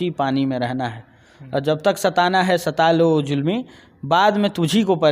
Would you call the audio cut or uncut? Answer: uncut